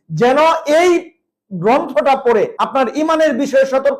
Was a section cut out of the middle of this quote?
yes; 1 cut; at 2.6 s

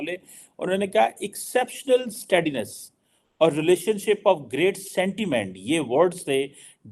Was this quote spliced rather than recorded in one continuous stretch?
no; 0 cuts

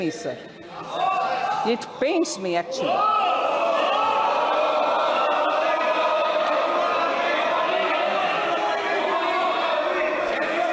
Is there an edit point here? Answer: no; 0 cuts

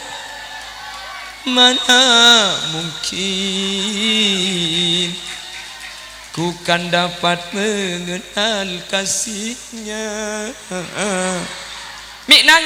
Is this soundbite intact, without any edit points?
yes; 0 cuts

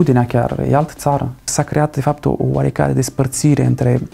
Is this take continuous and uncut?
no; 1 cut; at 1.5 s

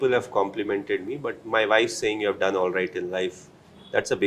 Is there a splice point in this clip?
no; 0 cuts

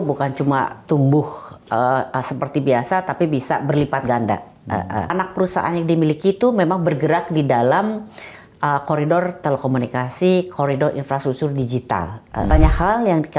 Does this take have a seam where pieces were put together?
yes; 2 cuts; at 5.1 s, 12.5 s

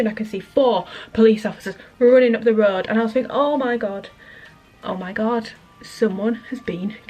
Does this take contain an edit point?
no; 0 cuts

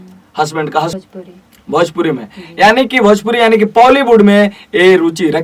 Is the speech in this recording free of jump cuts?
no; 1 cut; at 0.9 s

